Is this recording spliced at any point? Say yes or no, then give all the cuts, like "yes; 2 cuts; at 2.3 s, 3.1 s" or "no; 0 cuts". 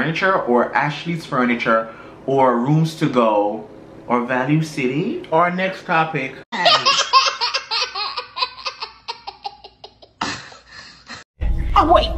no; 0 cuts